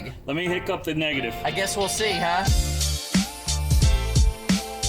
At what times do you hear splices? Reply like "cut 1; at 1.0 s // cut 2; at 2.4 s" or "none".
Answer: cut 1; at 2.4 s